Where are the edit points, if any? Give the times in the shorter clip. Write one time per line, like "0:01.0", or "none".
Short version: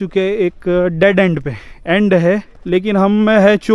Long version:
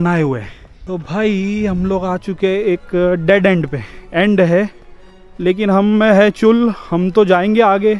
0:02.5